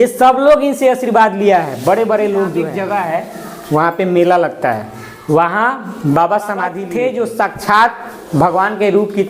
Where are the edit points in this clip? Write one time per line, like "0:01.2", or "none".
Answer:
0:02.7
0:06.8

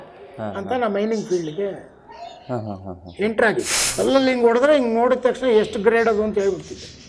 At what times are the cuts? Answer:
0:03.8

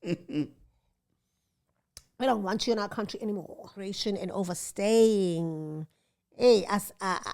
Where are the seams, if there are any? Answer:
0:03.9

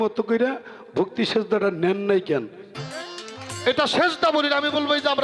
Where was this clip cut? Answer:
0:02.6

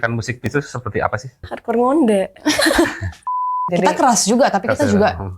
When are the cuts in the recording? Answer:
0:01.5
0:03.5

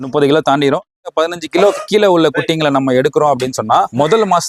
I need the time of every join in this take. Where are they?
0:01.0

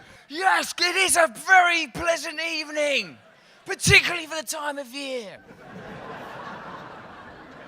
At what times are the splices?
0:02.1

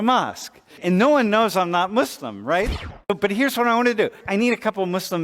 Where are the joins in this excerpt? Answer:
0:00.8
0:02.9
0:04.2

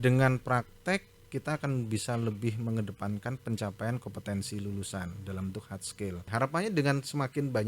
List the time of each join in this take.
0:06.2

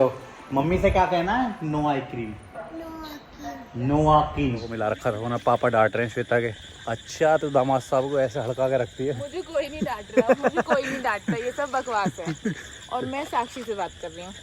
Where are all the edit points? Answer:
0:04.7

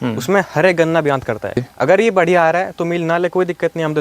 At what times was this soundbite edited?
0:01.7

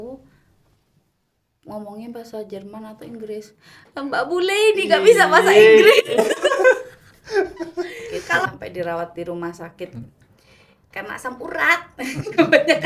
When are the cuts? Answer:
0:08.5

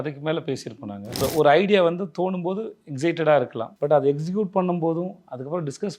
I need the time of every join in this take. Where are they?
0:01.2
0:03.6

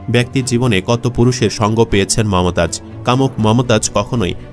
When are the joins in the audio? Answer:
0:02.9

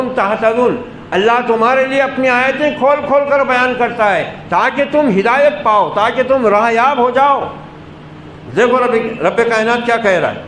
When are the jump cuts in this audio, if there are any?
none

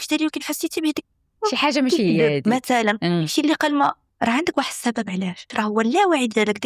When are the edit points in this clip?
0:04.1
0:05.5

